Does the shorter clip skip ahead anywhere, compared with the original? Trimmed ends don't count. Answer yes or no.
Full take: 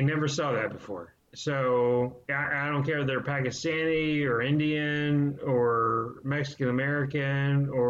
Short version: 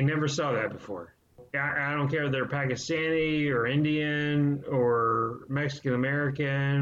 yes